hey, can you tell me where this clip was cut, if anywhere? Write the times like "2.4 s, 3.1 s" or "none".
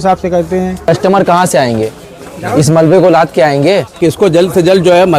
0.8 s, 4.0 s